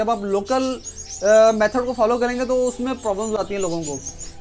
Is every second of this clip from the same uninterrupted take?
yes; 0 cuts

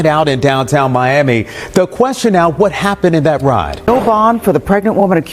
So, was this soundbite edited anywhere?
yes; 1 cut; at 3.8 s

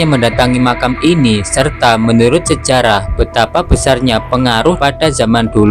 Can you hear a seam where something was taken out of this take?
yes; 1 cut; at 4.8 s

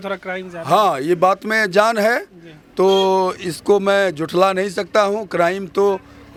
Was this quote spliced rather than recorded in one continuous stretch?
no; 0 cuts

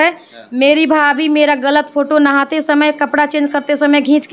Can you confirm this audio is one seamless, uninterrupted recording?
yes; 0 cuts

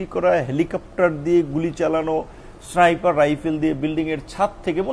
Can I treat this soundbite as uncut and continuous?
yes; 0 cuts

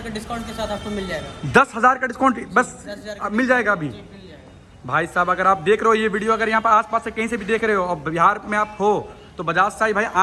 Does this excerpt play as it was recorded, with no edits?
yes; 0 cuts

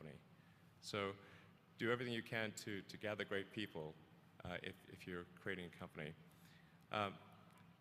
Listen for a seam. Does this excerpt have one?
no; 0 cuts

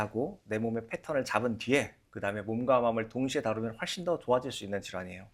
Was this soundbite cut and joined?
no; 0 cuts

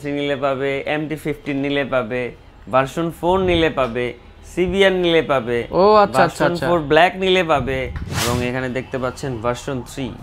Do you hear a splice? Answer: yes; 1 cut; at 8.1 s

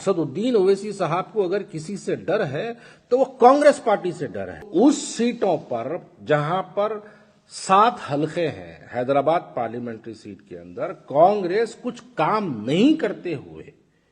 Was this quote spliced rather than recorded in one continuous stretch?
yes; 1 cut; at 4.7 s

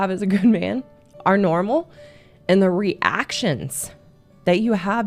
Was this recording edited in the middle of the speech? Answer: no; 0 cuts

